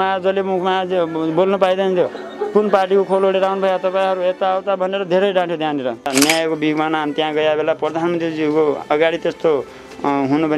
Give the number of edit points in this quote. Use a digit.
1